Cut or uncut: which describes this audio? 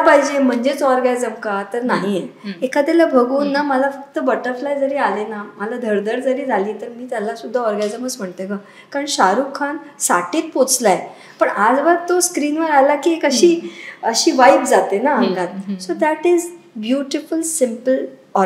uncut